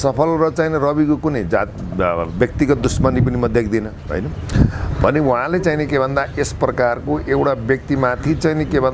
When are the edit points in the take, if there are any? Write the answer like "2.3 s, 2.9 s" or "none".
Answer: none